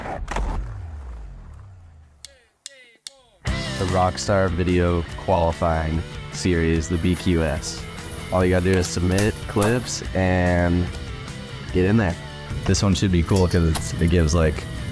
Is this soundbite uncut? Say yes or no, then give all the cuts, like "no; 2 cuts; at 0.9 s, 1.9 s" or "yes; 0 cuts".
no; 1 cut; at 2.1 s